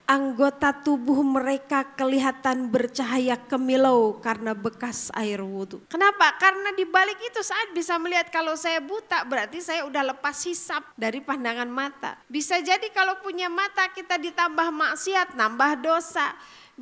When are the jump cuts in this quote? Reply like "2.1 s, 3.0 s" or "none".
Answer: 5.8 s, 10.9 s, 12.2 s